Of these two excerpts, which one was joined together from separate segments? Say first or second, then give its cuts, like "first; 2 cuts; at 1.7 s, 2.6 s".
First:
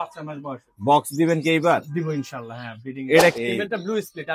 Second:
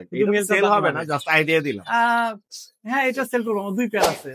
first; 1 cut; at 3.3 s